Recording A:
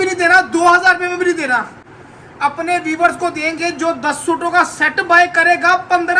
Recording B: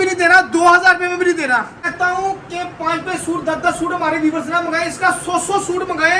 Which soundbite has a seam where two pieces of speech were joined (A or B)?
B